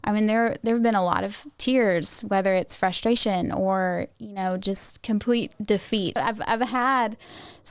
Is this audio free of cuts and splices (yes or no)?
no